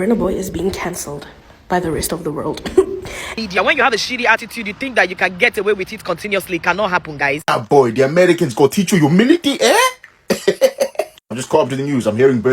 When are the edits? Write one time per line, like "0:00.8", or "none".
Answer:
0:03.3
0:07.5